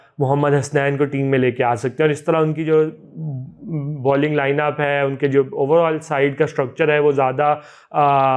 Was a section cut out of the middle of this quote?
no; 0 cuts

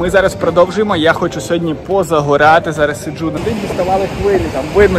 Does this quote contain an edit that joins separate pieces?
yes; 1 cut; at 3.4 s

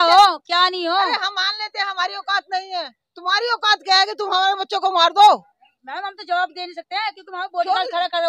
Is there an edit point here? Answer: no; 0 cuts

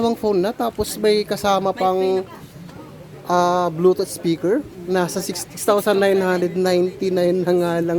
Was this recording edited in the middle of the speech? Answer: yes; 1 cut; at 5.3 s

